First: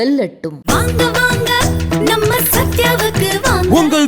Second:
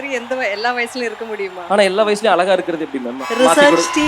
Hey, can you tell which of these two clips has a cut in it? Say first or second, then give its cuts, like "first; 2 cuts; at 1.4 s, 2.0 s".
second; 1 cut; at 3.2 s